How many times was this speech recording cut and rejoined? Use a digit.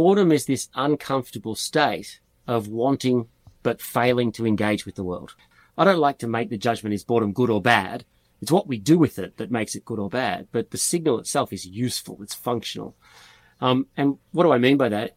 1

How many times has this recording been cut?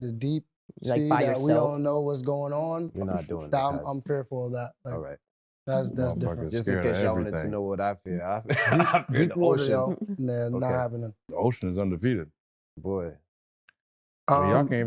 0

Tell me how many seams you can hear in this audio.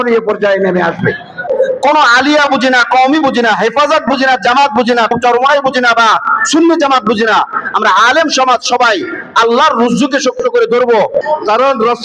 3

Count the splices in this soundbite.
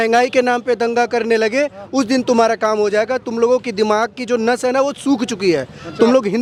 0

